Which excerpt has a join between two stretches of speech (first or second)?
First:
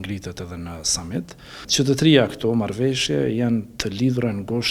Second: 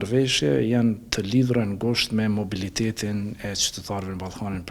first